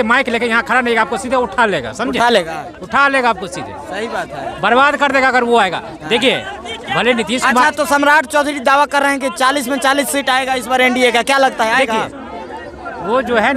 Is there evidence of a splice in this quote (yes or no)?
no